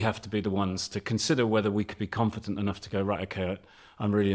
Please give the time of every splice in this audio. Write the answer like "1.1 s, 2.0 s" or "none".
none